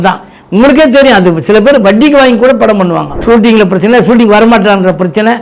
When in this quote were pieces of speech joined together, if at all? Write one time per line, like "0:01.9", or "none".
0:03.1